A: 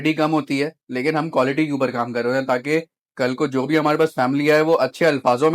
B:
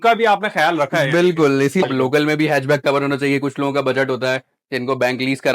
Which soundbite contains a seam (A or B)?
B